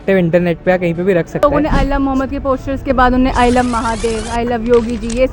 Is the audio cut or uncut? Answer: cut